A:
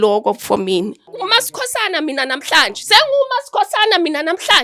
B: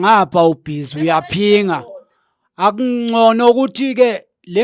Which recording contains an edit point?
A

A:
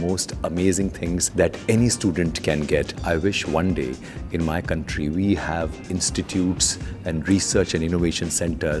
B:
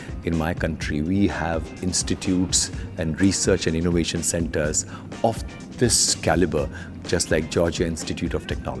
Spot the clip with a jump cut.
A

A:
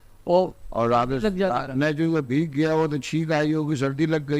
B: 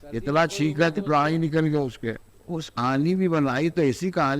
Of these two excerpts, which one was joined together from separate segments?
B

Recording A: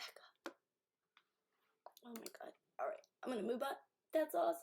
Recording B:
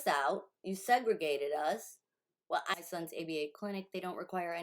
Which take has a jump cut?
B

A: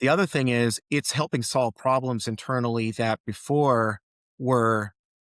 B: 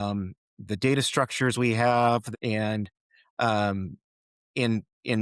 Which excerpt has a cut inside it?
B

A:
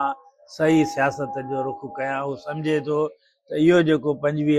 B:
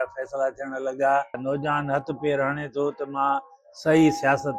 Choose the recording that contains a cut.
B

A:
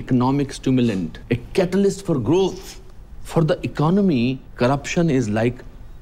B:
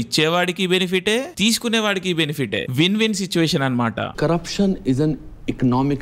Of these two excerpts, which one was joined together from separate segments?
B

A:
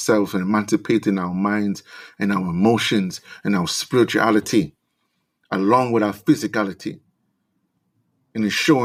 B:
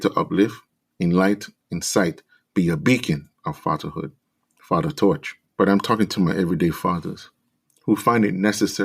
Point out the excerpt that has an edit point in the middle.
B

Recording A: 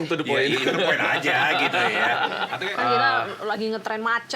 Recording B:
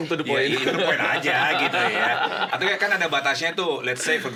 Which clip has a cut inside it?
A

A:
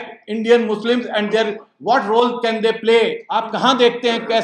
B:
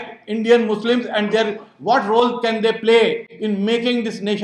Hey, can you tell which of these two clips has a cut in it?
A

